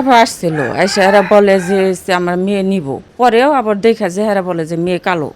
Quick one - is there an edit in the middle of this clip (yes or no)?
yes